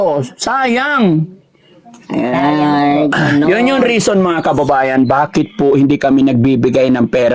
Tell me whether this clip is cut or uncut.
uncut